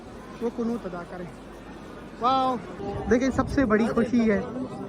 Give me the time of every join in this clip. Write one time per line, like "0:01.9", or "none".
0:02.8